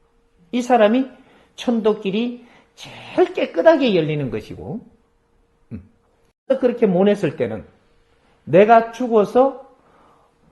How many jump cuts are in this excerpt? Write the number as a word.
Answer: one